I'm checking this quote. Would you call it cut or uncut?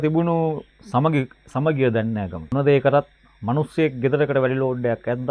cut